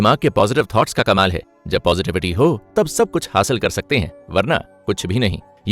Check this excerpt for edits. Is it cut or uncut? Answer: uncut